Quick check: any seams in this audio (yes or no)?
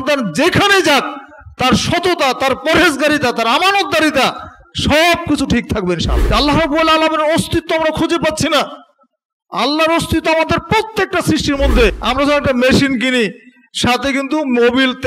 yes